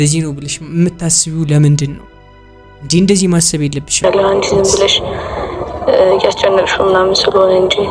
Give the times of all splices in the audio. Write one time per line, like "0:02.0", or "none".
0:04.0